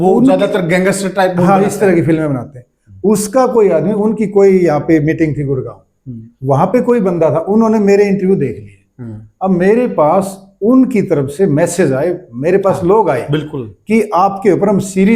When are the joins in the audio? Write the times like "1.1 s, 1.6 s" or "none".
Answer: none